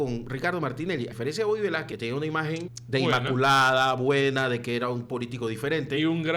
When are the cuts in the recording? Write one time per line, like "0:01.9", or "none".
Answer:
0:01.1
0:01.9
0:02.8